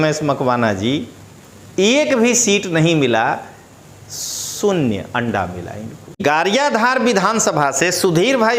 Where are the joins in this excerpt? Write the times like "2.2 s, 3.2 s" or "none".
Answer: 6.2 s